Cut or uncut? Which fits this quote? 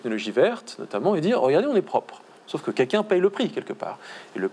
uncut